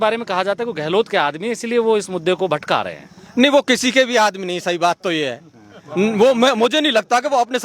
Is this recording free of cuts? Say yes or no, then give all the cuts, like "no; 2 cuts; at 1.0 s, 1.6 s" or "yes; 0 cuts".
yes; 0 cuts